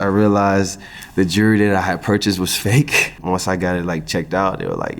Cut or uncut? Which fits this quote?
cut